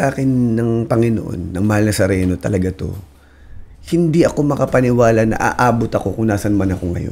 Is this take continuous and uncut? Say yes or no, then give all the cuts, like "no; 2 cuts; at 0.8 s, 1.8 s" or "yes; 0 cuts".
yes; 0 cuts